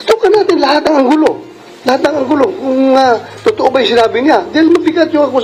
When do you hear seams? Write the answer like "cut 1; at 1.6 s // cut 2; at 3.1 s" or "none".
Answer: none